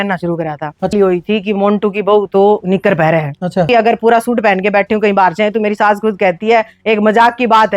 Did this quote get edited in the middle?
yes; 2 cuts; at 0.9 s, 3.7 s

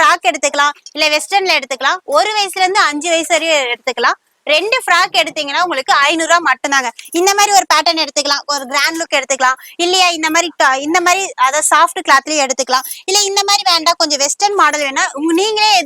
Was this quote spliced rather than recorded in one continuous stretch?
no; 0 cuts

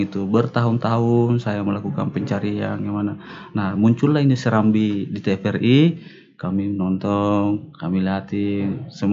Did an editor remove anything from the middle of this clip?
no; 0 cuts

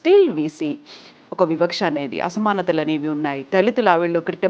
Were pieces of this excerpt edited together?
no; 0 cuts

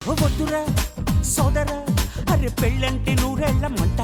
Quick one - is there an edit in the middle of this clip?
no; 0 cuts

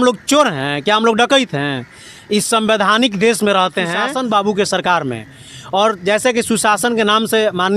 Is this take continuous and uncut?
no; 1 cut; at 4.1 s

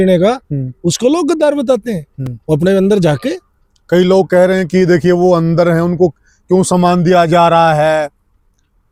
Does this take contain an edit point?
no; 0 cuts

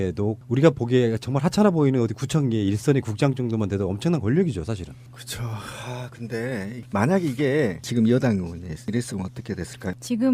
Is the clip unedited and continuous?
no; 1 cut; at 1.3 s

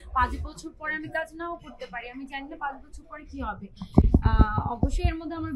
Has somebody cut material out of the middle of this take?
no; 0 cuts

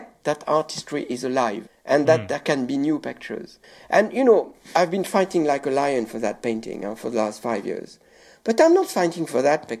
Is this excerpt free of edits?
yes; 0 cuts

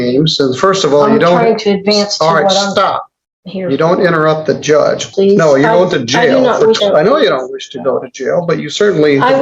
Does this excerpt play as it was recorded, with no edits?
no; 2 cuts; at 5.1 s, 6.8 s

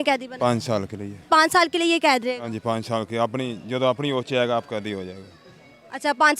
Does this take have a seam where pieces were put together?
no; 0 cuts

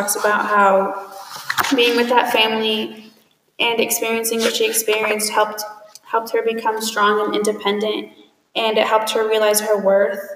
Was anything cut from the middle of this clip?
no; 0 cuts

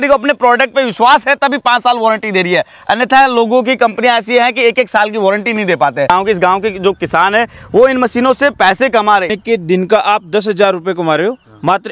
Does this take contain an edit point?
yes; 2 cuts; at 6.1 s, 9.3 s

